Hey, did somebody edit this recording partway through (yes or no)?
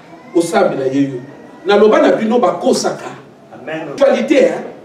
yes